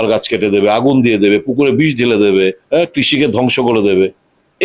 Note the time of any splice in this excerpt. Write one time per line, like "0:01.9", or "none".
0:02.6